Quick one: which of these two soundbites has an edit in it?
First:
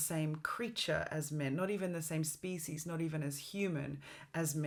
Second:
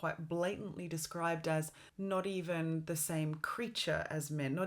second; 1 cut; at 1.8 s

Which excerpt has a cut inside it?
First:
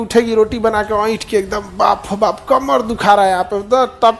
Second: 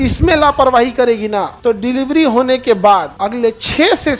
second; 2 cuts; at 1.5 s, 3.1 s

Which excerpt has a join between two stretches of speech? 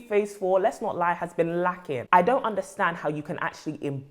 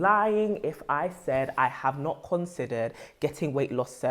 first; 1 cut; at 1.9 s

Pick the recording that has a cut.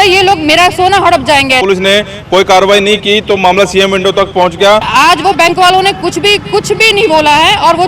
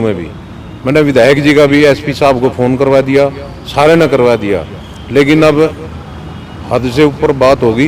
first; 2 cuts; at 1.6 s, 4.9 s

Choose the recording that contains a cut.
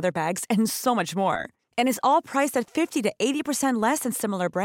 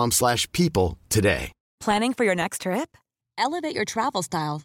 second; 1 cut; at 1.6 s

